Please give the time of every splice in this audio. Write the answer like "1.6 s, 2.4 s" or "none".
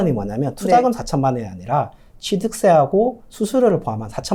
none